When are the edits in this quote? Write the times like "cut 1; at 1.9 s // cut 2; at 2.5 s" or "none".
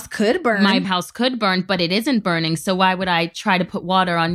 none